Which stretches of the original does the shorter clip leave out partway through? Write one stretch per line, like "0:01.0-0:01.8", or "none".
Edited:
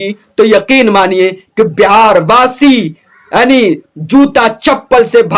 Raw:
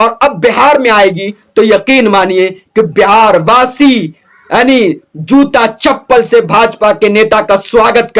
none